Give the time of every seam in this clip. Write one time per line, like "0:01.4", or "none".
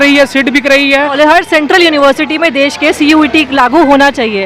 0:01.1

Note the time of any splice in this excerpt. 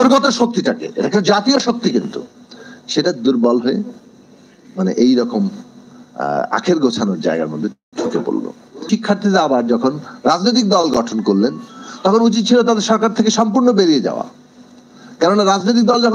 0:08.9

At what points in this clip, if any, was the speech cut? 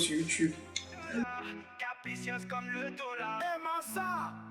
0:01.3

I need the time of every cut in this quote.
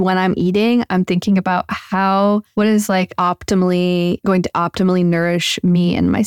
0:03.0
0:04.2

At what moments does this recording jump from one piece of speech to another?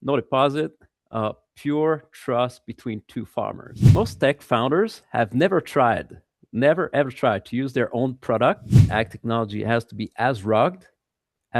0:03.8
0:08.9

